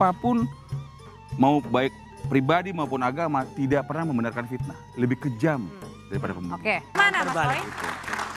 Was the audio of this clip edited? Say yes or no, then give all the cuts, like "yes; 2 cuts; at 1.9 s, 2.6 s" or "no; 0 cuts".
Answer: yes; 1 cut; at 7.0 s